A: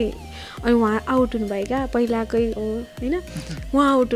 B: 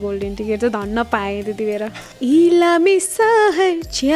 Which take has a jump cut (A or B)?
B